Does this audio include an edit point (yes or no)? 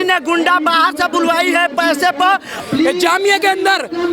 yes